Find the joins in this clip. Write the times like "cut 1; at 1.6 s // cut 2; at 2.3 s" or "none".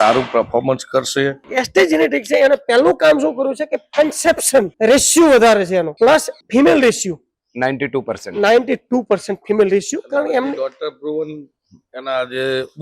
cut 1; at 1.5 s // cut 2; at 4.7 s // cut 3; at 6.2 s